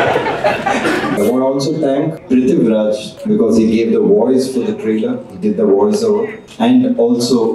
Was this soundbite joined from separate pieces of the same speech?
yes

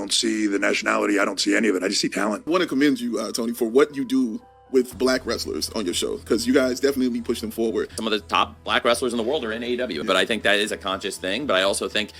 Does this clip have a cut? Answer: yes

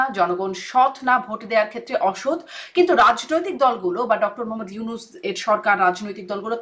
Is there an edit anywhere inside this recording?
no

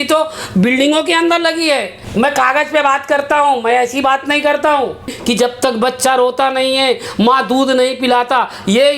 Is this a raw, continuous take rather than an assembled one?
no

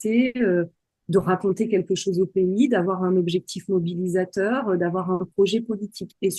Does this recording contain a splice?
no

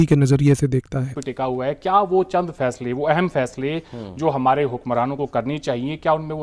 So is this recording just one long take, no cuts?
no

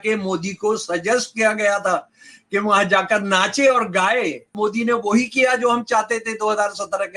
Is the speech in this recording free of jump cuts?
no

